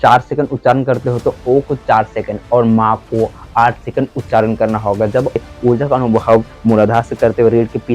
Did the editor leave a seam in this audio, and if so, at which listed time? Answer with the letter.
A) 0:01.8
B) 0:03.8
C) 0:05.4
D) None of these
C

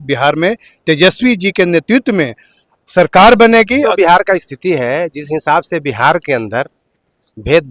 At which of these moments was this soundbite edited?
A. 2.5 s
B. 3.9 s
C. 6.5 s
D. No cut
B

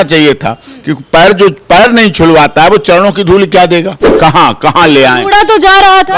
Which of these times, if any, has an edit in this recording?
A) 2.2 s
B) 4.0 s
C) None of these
B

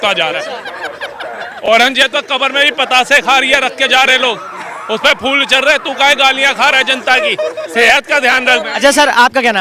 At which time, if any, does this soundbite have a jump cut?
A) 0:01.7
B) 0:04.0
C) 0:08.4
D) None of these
D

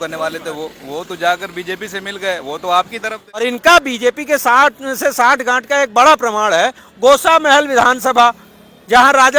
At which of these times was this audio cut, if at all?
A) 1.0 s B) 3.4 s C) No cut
B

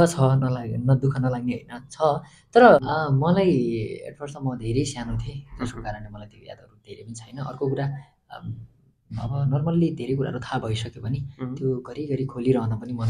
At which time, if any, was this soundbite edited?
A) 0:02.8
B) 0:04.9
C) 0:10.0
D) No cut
A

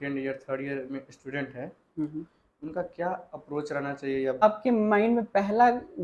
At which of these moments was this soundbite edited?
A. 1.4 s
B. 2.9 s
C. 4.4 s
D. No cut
C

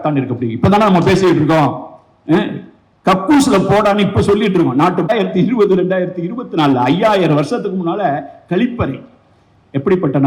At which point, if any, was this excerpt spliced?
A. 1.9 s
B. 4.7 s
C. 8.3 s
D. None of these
D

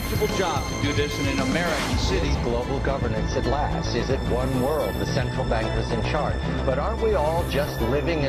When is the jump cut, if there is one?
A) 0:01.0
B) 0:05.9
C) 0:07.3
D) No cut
C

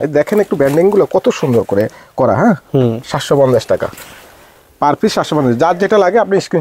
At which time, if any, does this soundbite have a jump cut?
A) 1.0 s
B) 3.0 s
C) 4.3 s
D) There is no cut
D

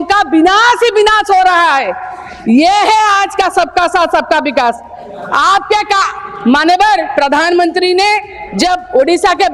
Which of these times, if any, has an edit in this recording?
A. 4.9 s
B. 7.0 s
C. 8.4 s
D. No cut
D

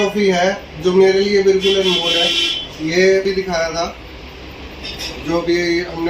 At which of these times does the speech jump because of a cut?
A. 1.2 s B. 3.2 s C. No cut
B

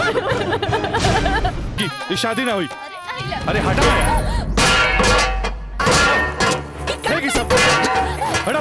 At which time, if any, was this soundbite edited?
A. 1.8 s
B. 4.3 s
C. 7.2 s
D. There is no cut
A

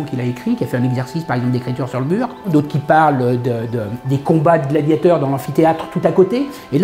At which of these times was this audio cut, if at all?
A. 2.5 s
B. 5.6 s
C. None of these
A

